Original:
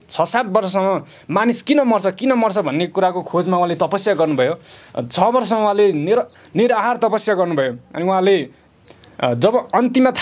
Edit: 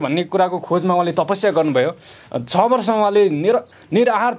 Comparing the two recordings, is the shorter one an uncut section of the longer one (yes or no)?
yes